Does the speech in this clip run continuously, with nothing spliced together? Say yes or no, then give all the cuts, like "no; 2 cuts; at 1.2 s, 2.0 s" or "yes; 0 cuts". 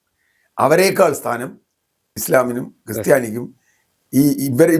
no; 1 cut; at 2.1 s